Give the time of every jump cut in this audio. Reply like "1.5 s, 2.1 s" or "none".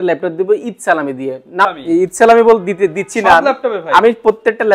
1.6 s